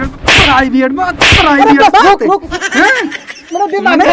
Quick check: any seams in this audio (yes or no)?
no